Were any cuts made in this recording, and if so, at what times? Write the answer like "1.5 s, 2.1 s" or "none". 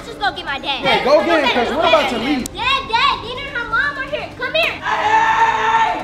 4.9 s

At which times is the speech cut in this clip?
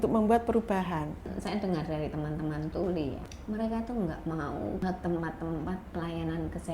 1.2 s, 3.3 s, 4.8 s

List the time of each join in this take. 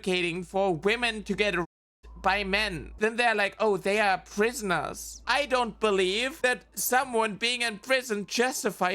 2.9 s, 6.3 s

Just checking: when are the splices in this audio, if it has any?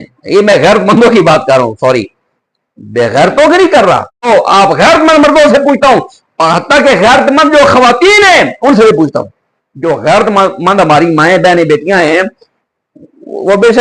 4.3 s

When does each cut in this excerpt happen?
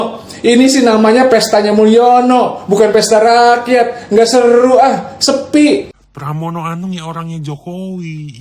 6.0 s

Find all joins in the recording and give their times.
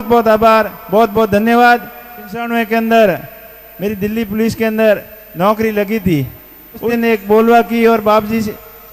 2.4 s, 6.8 s

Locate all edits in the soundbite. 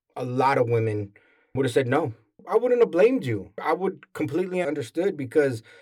2.4 s, 3.6 s, 4.6 s

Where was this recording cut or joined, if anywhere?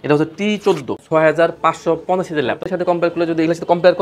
1.0 s, 2.6 s

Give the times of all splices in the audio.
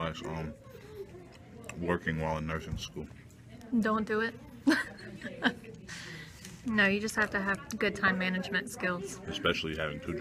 none

